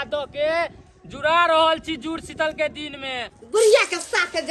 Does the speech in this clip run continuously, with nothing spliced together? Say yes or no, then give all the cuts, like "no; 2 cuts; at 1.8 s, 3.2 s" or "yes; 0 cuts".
no; 1 cut; at 3.3 s